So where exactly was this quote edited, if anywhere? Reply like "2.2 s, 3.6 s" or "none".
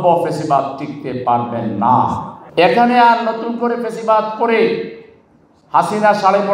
2.3 s

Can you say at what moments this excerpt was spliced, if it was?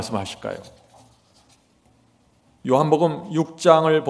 none

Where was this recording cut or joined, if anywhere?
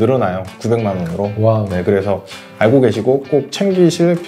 none

